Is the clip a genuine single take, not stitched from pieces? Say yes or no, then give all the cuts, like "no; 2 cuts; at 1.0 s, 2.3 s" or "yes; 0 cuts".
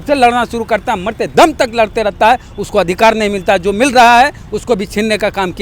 yes; 0 cuts